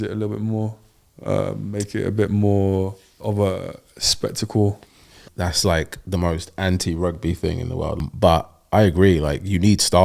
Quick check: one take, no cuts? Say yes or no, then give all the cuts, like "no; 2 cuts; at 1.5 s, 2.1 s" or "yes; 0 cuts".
no; 3 cuts; at 3.1 s, 5.2 s, 8.1 s